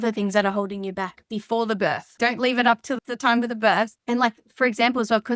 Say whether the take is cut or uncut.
cut